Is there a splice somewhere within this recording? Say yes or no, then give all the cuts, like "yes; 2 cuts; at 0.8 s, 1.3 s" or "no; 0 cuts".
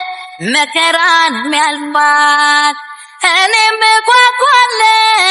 no; 0 cuts